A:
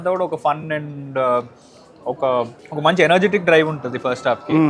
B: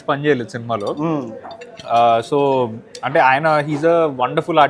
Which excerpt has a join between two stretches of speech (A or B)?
A